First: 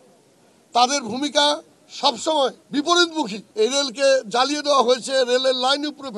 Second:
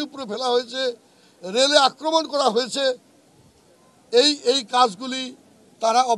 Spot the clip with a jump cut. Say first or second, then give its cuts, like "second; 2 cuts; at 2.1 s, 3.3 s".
first; 2 cuts; at 2.6 s, 3.4 s